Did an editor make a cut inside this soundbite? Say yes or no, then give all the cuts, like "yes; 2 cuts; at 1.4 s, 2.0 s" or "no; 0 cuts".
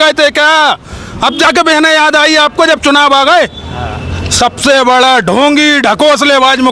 no; 0 cuts